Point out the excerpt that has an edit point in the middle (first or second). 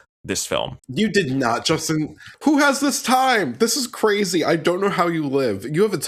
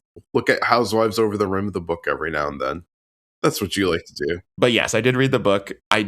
second